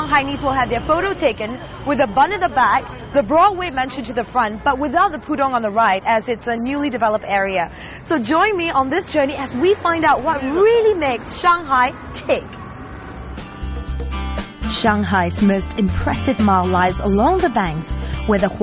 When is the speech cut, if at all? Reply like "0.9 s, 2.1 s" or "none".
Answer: 12.1 s